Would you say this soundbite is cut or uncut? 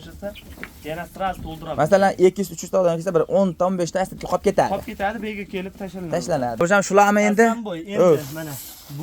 cut